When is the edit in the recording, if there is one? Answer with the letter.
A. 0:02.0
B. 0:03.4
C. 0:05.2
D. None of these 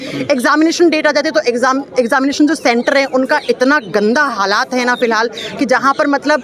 D